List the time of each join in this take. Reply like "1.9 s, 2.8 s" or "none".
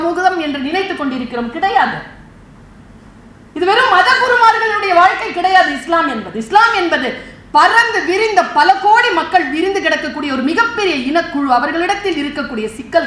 none